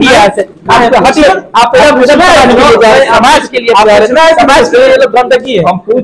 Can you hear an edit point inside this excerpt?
no; 0 cuts

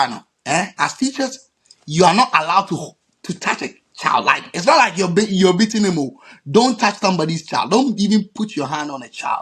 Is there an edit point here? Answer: no; 0 cuts

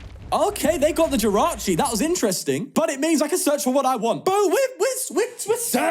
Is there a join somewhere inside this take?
yes; 2 cuts; at 2.7 s, 4.2 s

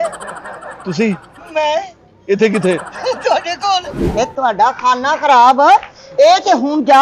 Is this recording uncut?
no; 1 cut; at 4.0 s

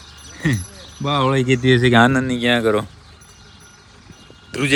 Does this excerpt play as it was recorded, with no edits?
yes; 0 cuts

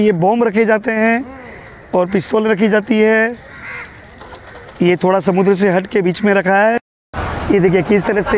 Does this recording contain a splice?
yes; 1 cut; at 6.8 s

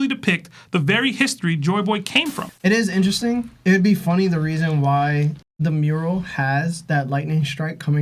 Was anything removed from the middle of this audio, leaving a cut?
yes; 1 cut; at 2.5 s

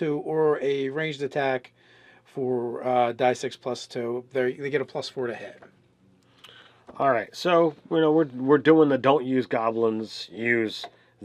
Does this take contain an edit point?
yes; 1 cut; at 1.7 s

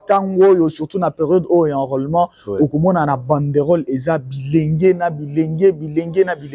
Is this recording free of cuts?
yes; 0 cuts

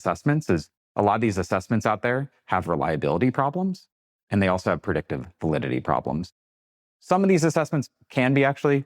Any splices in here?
yes; 1 cut; at 6.3 s

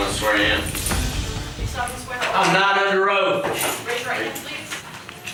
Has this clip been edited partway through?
no; 0 cuts

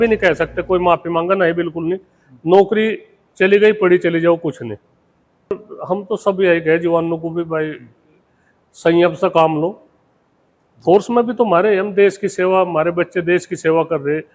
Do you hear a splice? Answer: yes; 1 cut; at 5.5 s

